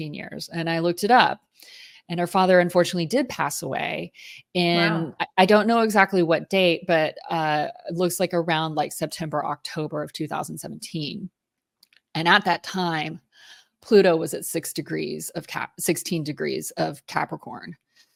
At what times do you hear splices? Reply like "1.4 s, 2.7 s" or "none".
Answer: none